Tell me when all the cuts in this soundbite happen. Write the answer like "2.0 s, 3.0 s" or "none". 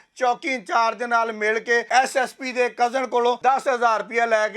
1.9 s, 3.4 s